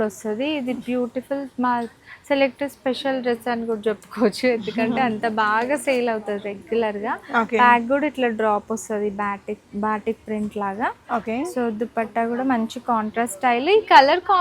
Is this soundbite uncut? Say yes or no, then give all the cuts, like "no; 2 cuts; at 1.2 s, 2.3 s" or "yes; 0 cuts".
yes; 0 cuts